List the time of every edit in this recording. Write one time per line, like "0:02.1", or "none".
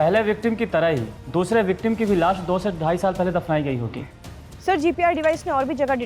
0:01.1
0:04.1

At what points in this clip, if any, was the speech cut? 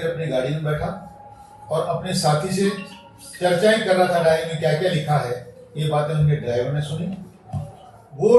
none

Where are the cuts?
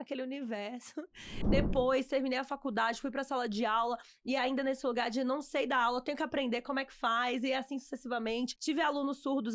0:01.4

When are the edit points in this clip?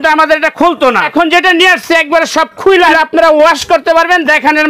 0:01.0
0:02.9

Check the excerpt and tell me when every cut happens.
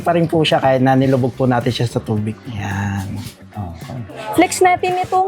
0:02.4
0:04.2

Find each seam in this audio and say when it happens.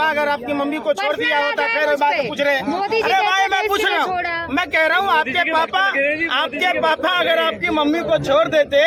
none

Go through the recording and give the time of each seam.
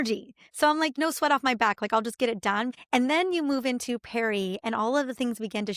0:00.9
0:02.7

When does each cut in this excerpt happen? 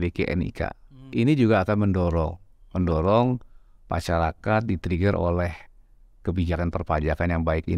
0:01.1

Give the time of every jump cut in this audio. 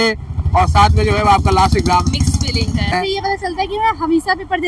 0:02.9

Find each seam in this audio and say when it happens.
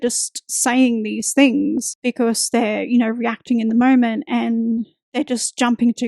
0:01.9

